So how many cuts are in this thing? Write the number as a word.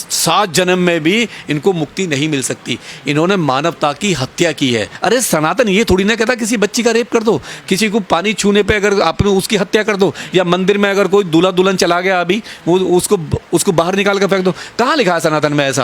one